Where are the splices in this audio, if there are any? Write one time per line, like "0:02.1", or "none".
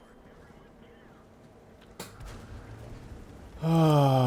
none